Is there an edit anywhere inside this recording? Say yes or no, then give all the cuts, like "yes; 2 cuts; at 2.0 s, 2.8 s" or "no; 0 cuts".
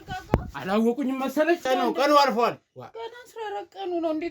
yes; 1 cut; at 1.6 s